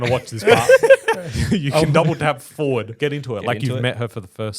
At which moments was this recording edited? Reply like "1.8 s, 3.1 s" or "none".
2.9 s